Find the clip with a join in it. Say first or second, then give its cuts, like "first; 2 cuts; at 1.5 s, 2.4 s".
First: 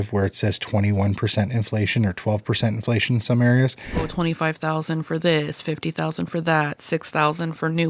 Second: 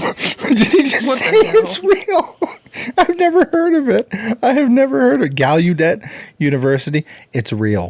first; 1 cut; at 4.1 s